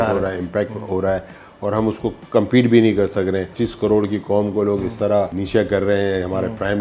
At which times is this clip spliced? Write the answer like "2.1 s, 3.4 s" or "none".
3.6 s, 5.4 s